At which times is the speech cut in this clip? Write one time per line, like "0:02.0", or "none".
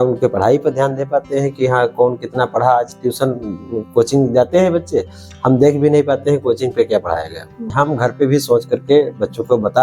0:07.7